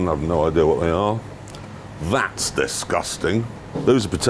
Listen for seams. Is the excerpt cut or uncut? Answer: uncut